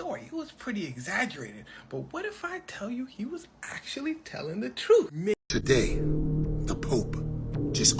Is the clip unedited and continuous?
no; 1 cut; at 5.3 s

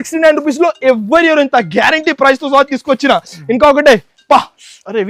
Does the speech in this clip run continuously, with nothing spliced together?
yes; 0 cuts

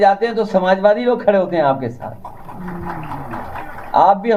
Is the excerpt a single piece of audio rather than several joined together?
yes; 0 cuts

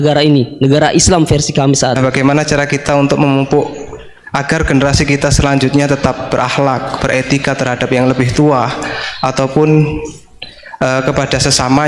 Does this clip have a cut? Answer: yes; 1 cut; at 2.0 s

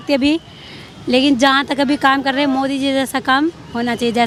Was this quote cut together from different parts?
no; 0 cuts

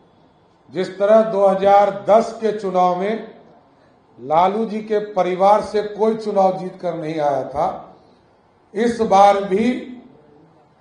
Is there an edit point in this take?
no; 0 cuts

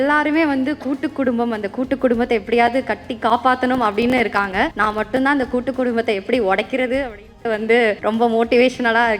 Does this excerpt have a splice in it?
yes; 2 cuts; at 4.7 s, 8.0 s

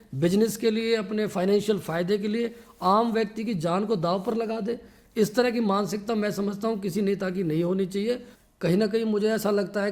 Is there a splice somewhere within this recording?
yes; 1 cut; at 8.3 s

